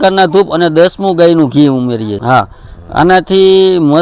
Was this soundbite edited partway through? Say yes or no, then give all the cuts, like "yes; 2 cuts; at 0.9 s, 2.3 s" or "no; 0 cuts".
yes; 1 cut; at 2.2 s